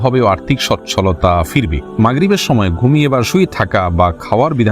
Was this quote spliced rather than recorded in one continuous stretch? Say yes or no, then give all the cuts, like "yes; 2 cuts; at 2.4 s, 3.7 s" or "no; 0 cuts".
yes; 1 cut; at 2.0 s